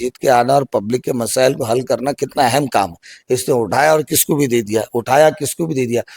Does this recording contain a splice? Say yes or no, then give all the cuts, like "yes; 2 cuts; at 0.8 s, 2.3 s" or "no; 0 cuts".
no; 0 cuts